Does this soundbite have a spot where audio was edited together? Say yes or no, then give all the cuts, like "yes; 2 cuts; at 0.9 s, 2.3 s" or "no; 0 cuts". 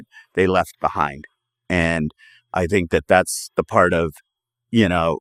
no; 0 cuts